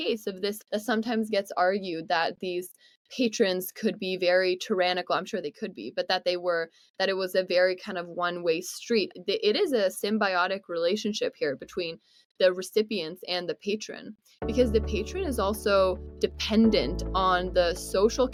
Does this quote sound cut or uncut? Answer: uncut